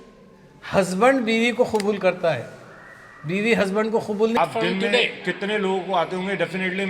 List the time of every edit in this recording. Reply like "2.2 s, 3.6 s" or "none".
4.4 s